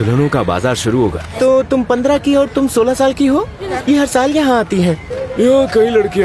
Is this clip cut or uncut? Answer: cut